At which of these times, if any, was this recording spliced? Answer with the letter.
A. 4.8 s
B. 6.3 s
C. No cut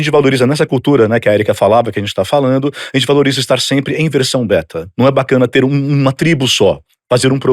A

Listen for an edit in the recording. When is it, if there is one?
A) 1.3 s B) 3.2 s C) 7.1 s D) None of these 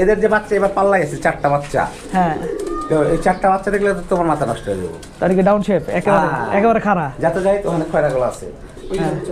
D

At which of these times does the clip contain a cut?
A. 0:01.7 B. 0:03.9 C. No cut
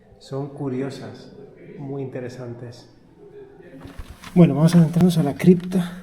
B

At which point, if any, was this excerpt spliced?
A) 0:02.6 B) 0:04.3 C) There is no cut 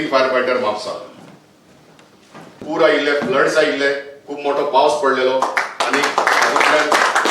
A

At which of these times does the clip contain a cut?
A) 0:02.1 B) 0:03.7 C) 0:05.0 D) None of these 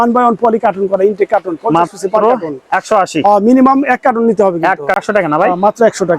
C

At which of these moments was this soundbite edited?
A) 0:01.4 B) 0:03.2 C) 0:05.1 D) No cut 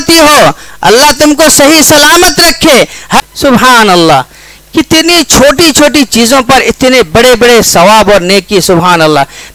B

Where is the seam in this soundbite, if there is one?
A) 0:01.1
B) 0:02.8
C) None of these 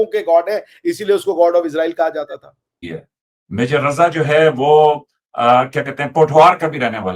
B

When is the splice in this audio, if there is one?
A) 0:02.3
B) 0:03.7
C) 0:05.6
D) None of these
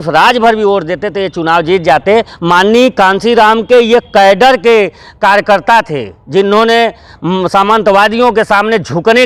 A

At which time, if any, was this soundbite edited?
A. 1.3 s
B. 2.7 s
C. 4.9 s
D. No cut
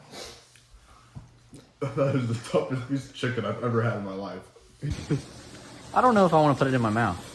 C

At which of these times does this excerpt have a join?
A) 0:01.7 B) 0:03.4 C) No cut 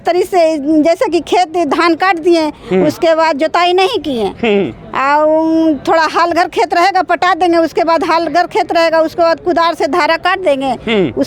C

